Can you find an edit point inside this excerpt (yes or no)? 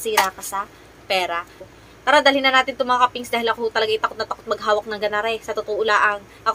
no